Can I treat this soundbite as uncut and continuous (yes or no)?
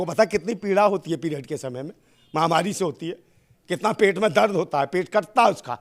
yes